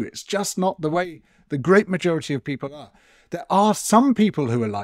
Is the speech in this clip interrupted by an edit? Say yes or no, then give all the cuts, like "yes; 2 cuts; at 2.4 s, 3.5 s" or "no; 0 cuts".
no; 0 cuts